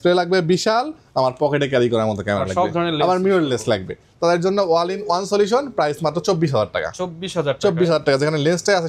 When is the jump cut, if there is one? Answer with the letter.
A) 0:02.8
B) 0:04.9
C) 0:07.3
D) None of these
D